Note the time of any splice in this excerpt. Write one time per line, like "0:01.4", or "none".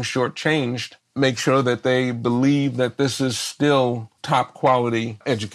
0:00.9
0:04.1

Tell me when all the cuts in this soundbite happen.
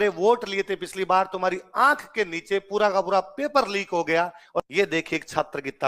0:04.6

